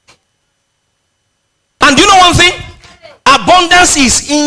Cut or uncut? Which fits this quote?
cut